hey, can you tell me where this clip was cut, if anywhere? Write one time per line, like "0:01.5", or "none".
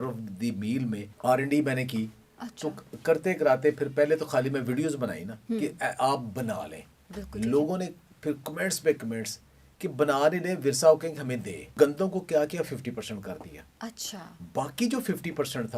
0:01.1
0:11.6